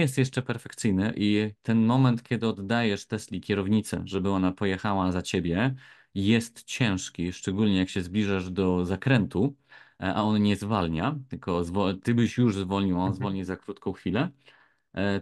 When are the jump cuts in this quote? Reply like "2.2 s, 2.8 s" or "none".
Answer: none